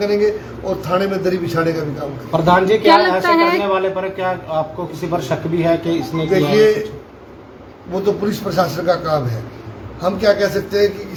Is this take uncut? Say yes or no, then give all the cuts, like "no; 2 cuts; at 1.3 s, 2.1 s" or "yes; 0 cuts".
yes; 0 cuts